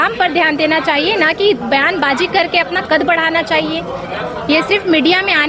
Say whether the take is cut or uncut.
uncut